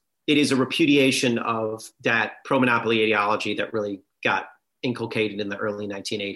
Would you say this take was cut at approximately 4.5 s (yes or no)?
no